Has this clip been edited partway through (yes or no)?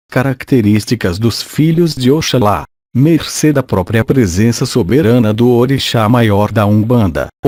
no